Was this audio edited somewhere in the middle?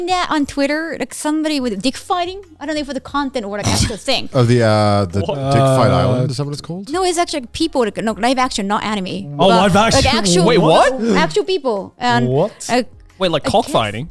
no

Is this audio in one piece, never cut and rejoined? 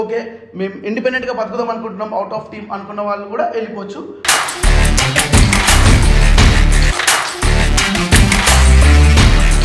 yes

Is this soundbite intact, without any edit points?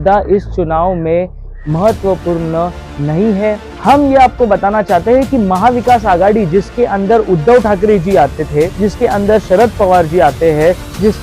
no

